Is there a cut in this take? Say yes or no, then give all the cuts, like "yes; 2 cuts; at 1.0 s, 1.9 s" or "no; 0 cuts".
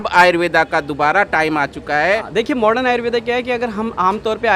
yes; 1 cut; at 2.3 s